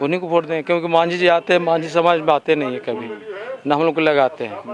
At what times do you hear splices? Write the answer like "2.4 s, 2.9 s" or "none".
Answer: none